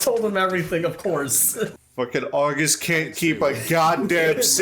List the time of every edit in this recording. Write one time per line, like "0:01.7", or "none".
0:01.7